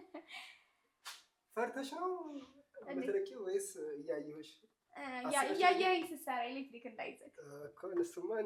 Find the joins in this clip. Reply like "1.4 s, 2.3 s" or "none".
none